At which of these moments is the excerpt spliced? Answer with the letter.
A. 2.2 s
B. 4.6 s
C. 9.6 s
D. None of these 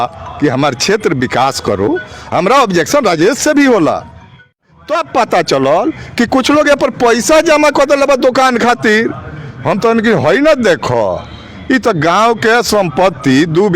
B